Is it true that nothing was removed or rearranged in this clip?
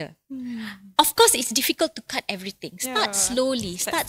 yes; 0 cuts

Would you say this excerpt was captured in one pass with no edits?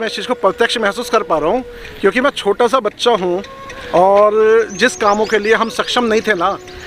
yes; 0 cuts

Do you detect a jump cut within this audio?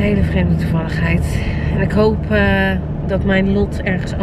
no; 0 cuts

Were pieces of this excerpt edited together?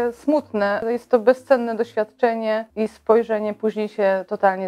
yes; 2 cuts; at 0.8 s, 2.7 s

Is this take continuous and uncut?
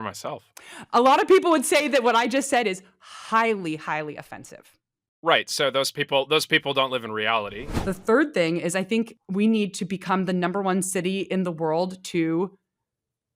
no; 2 cuts; at 7.7 s, 9.2 s

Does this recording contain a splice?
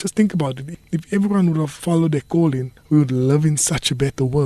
yes; 1 cut; at 2.7 s

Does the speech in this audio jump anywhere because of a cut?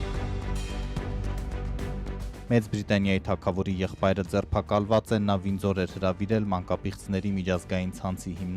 yes; 1 cut; at 2.3 s

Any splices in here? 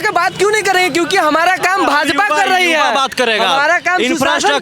no; 0 cuts

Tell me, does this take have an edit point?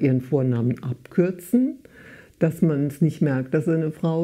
no; 0 cuts

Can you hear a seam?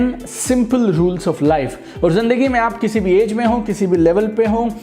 no; 0 cuts

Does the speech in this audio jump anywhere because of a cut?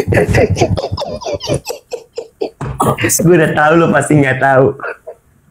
no; 0 cuts

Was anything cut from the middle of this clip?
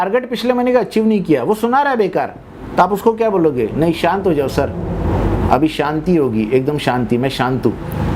no; 0 cuts

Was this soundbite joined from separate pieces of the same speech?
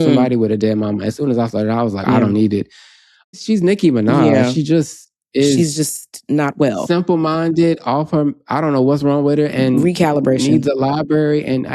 yes; 2 cuts; at 2.0 s, 3.4 s

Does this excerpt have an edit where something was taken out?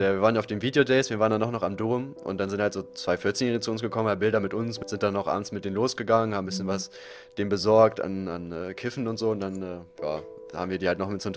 yes; 2 cuts; at 2.8 s, 4.8 s

